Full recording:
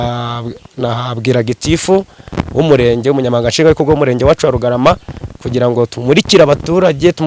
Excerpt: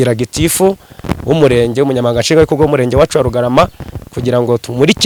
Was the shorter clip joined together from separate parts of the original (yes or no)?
no